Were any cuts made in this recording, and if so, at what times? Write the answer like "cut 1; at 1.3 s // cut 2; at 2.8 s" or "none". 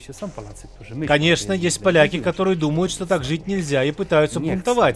cut 1; at 1.1 s

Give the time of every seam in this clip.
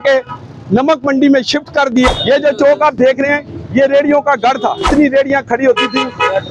cut 1; at 2.1 s // cut 2; at 4.9 s

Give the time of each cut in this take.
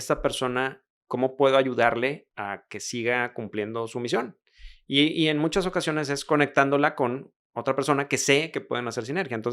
cut 1; at 0.9 s // cut 2; at 2.3 s

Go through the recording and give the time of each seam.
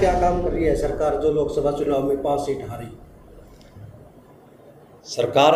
none

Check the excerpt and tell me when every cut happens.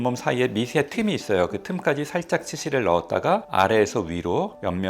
none

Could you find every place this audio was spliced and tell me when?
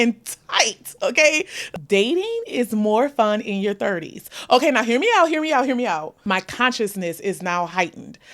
cut 1; at 1.6 s // cut 2; at 6.1 s

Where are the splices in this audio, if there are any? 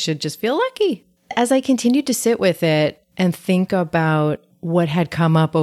cut 1; at 1.3 s // cut 2; at 4.5 s

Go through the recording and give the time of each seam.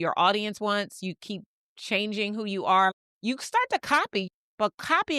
cut 1; at 2.9 s // cut 2; at 4.3 s

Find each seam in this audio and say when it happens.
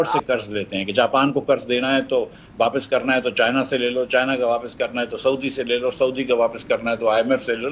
none

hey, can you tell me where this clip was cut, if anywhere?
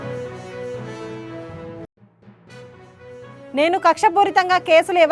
cut 1; at 1.8 s // cut 2; at 2.9 s

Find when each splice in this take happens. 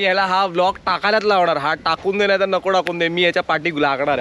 none

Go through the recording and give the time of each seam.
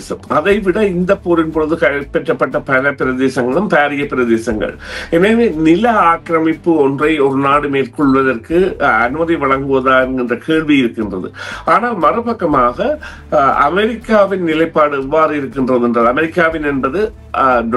none

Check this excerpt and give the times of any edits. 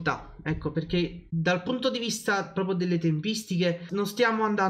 cut 1; at 1.2 s // cut 2; at 3.8 s

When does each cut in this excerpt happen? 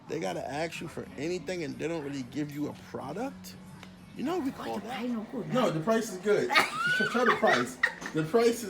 cut 1; at 4.8 s

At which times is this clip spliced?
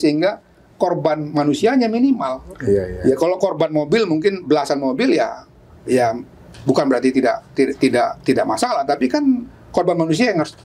none

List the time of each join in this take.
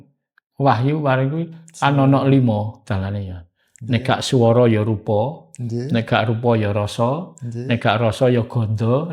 none

